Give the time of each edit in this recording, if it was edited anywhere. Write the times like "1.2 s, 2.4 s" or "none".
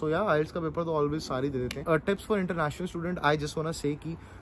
1.8 s